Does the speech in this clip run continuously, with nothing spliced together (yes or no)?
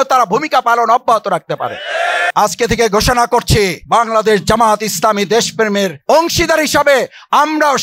no